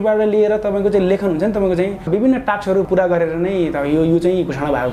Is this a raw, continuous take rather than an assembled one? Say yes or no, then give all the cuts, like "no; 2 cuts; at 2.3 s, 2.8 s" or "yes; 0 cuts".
no; 2 cuts; at 2.1 s, 2.9 s